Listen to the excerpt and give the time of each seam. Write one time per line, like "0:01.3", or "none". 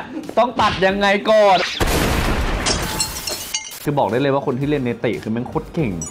0:01.6
0:03.8